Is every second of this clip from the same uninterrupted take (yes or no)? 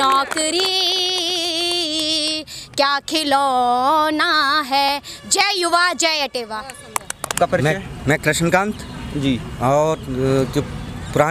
yes